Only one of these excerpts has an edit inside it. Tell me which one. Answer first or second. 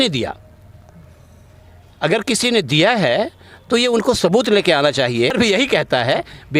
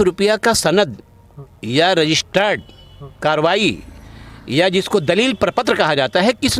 first